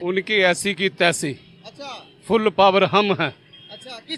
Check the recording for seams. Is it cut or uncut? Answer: uncut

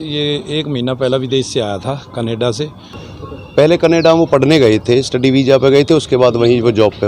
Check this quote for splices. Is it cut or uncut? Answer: cut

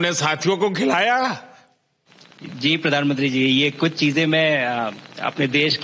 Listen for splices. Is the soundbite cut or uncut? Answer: uncut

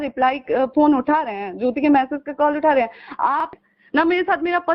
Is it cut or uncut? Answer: cut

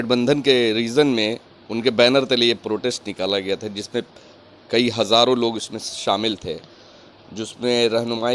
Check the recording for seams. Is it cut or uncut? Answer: uncut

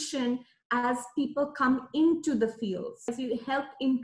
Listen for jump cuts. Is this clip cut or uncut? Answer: cut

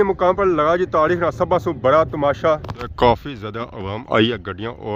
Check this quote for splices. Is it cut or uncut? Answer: uncut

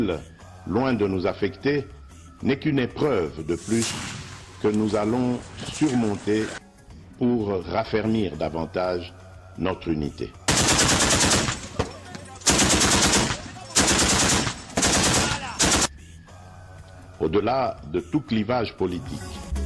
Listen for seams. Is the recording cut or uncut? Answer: uncut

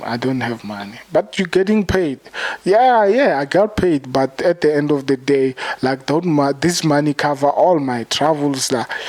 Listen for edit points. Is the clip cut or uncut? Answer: uncut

